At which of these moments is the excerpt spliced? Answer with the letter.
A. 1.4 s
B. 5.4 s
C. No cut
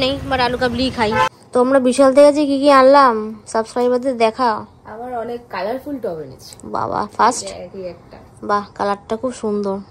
A